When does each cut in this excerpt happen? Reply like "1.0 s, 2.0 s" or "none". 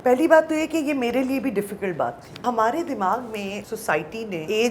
2.4 s, 4.0 s